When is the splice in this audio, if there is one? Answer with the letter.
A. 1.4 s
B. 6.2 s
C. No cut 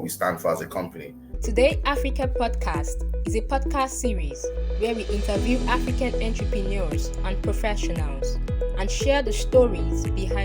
A